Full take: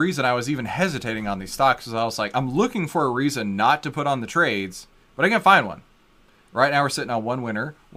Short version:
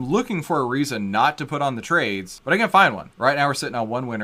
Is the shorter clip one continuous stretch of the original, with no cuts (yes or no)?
no